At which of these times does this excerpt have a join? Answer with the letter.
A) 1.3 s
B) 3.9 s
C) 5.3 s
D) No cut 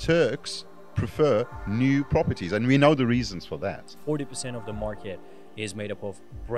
B